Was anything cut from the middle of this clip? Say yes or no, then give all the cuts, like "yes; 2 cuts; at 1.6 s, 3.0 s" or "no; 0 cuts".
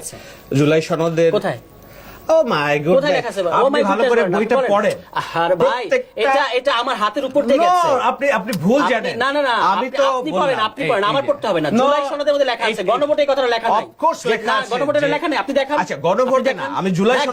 no; 0 cuts